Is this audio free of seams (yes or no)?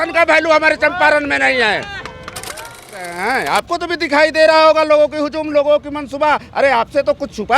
no